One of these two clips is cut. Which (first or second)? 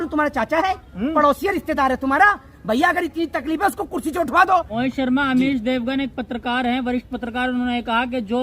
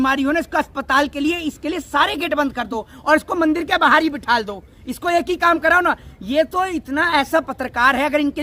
first